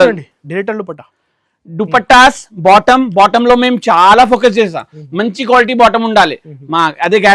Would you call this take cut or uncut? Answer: uncut